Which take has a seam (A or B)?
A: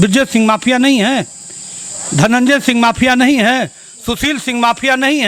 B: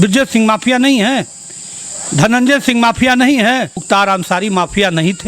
B